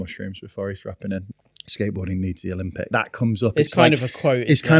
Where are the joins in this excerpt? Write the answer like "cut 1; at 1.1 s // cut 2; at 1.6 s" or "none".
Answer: cut 1; at 1.2 s // cut 2; at 2.9 s